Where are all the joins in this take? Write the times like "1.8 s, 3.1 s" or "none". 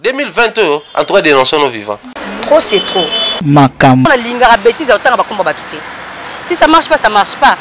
4.1 s